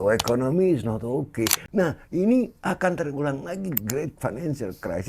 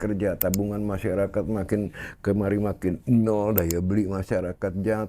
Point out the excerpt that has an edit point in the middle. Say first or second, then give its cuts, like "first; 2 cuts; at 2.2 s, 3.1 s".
first; 1 cut; at 1.6 s